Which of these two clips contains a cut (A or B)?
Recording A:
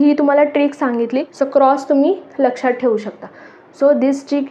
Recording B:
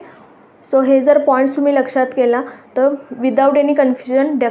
A